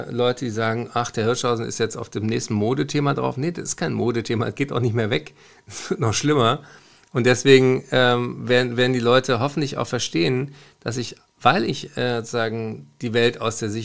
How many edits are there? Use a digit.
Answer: 0